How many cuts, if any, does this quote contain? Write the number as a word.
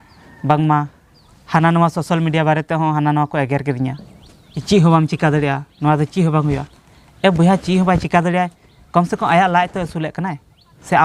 one